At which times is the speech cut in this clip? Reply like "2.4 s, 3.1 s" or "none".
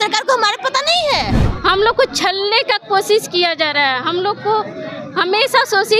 1.4 s